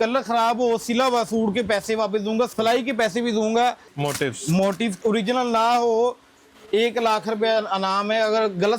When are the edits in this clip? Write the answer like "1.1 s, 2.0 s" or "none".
2.5 s, 3.9 s, 5.0 s